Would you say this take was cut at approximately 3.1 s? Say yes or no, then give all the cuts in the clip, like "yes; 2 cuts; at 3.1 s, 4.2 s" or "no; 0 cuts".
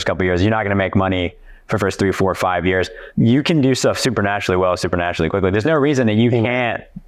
yes; 1 cut; at 3.1 s